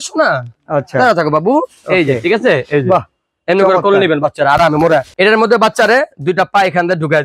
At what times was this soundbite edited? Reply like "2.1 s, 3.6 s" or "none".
5.1 s

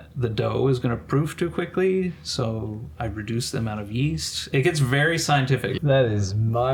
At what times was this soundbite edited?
5.8 s

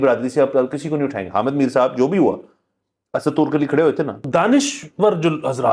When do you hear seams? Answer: 4.2 s

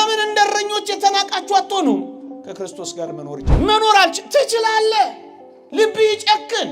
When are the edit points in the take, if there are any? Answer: 3.5 s

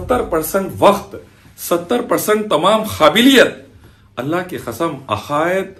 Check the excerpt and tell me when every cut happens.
none

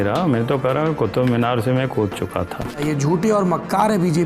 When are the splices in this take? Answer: 2.8 s

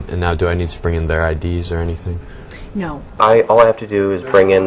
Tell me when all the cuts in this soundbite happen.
none

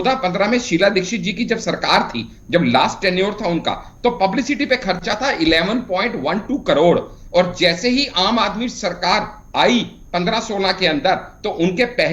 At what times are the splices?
none

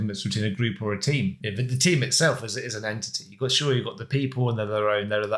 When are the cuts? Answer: 1.4 s

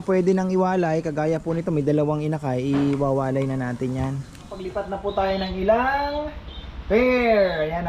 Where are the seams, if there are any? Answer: 4.7 s

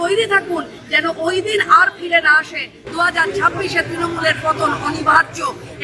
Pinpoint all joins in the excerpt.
2.8 s

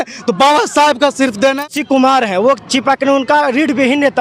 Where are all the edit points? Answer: 1.7 s

